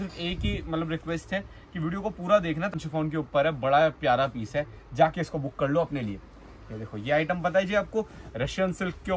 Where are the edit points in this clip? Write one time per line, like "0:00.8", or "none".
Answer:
0:02.7

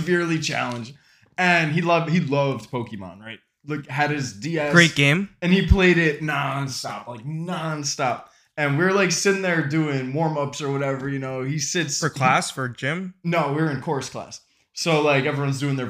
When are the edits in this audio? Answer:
none

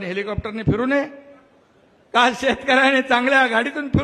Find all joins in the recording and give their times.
none

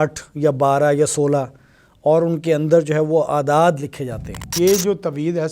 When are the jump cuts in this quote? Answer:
0:04.5

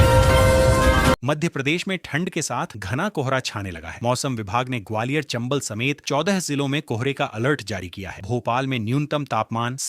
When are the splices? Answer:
0:01.2

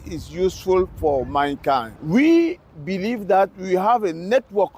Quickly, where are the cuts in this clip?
0:01.9

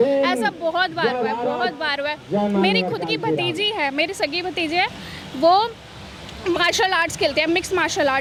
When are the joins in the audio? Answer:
none

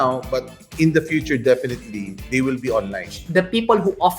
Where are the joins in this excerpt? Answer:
0:03.2

